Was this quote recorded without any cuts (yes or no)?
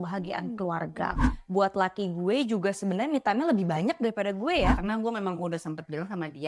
no